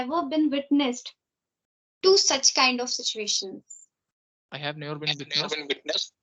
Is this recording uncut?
yes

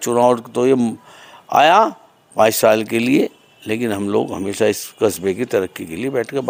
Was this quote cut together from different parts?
no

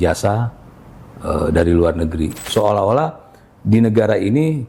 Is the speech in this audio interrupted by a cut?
yes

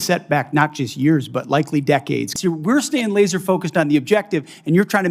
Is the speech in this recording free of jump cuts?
no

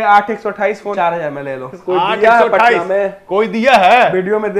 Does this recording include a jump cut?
yes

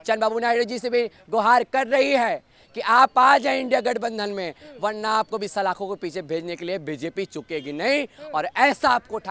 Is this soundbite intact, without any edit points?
yes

